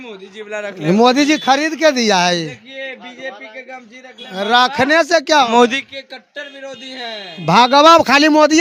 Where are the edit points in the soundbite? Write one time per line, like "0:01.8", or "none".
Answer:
none